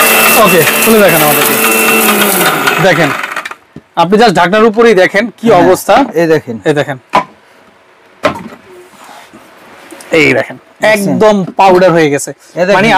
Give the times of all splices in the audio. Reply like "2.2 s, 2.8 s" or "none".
none